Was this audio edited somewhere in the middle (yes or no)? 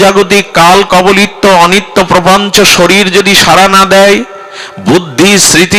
no